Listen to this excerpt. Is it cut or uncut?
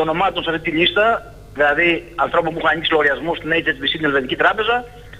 uncut